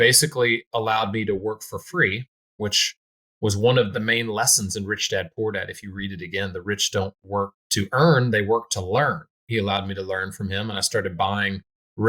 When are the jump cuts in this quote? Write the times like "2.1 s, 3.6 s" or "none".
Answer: 3.9 s, 7.6 s, 9.3 s